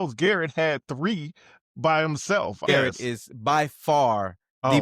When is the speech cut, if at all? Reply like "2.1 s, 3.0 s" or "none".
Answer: 2.8 s